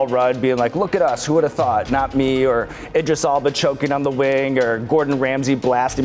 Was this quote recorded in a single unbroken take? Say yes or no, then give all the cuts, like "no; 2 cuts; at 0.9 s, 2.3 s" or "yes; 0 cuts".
yes; 0 cuts